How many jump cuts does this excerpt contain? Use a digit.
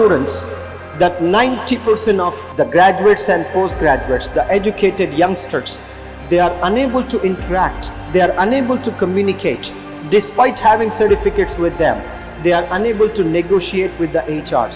1